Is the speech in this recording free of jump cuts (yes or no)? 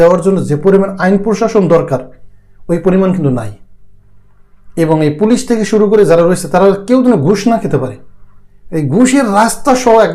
yes